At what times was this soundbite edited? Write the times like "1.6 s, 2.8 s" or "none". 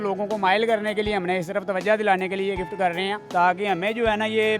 3.2 s